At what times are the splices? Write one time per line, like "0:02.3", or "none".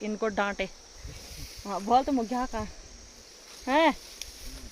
none